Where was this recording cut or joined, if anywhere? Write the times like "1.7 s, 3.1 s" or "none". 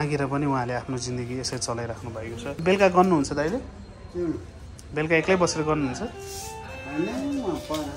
2.6 s